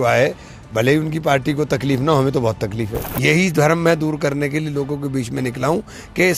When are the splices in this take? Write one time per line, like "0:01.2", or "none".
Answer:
0:03.0